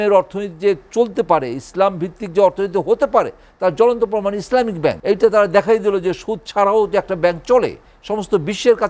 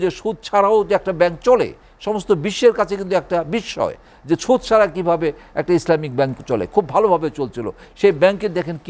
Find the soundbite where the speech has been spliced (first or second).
first